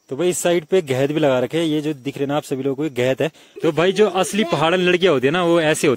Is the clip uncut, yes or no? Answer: no